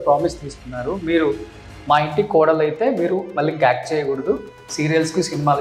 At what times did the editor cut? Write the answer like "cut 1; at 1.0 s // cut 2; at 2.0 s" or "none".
none